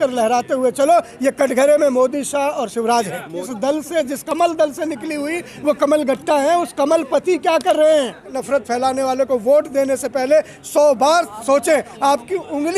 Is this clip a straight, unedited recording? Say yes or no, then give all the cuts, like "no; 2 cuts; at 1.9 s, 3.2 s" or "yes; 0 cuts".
no; 2 cuts; at 3.5 s, 8.4 s